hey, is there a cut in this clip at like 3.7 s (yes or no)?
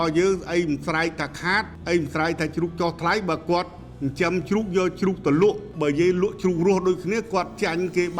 no